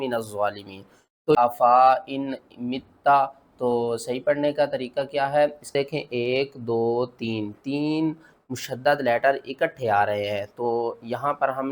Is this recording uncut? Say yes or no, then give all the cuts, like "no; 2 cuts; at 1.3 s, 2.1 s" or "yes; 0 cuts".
no; 2 cuts; at 1.4 s, 5.7 s